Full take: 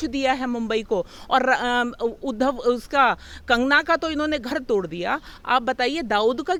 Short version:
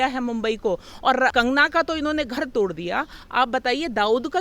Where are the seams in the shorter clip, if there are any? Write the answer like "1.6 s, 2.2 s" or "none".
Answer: 1.3 s